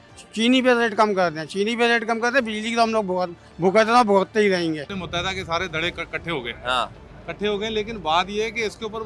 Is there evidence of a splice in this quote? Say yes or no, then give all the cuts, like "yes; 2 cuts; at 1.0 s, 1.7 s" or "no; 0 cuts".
yes; 1 cut; at 4.9 s